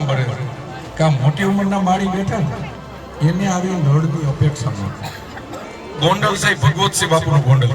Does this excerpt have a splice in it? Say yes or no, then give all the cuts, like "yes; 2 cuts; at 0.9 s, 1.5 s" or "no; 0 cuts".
yes; 1 cut; at 5.7 s